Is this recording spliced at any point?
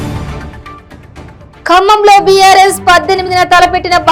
yes; 1 cut; at 1.5 s

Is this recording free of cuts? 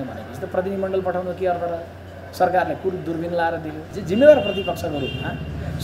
no; 1 cut; at 3.9 s

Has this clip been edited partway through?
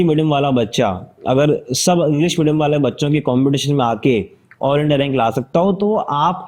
no; 0 cuts

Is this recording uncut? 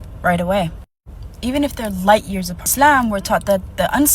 no; 1 cut; at 2.7 s

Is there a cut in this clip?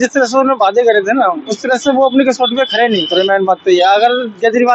no; 0 cuts

